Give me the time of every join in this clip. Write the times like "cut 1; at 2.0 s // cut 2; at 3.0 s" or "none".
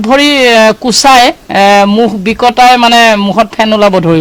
none